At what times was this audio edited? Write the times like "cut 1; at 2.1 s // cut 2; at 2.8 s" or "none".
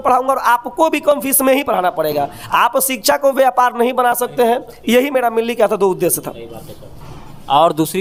none